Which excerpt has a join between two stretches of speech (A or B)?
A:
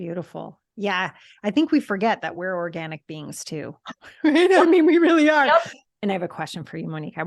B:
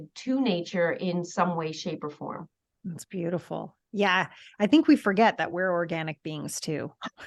A